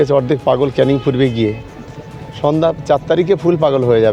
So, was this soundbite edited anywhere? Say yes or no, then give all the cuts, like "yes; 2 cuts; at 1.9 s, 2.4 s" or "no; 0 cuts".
no; 0 cuts